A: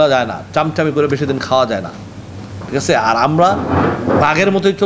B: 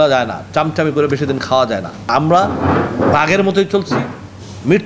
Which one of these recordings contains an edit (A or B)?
B